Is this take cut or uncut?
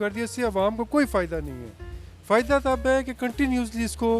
uncut